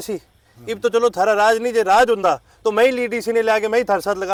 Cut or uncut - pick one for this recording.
uncut